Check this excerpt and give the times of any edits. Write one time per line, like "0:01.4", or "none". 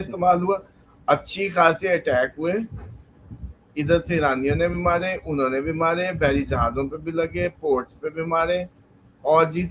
none